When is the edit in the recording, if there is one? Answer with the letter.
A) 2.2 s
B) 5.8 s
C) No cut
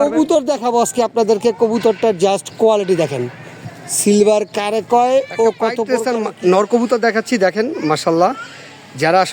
B